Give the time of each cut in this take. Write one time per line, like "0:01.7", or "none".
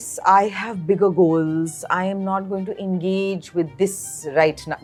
none